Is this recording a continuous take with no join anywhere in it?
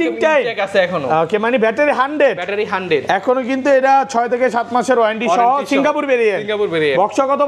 yes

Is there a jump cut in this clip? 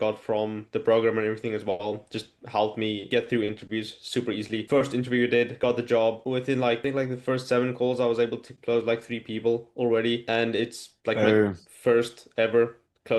no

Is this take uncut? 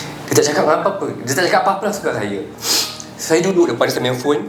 yes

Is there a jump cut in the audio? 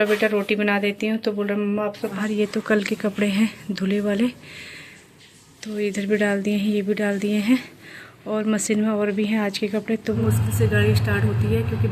yes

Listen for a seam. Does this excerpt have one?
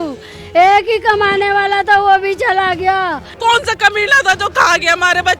yes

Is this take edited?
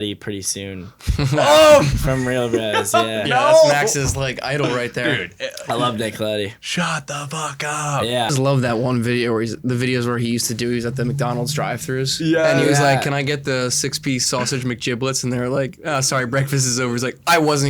yes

